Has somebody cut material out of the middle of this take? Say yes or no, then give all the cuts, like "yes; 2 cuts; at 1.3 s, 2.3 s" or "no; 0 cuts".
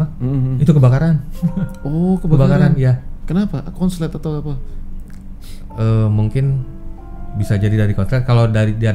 no; 0 cuts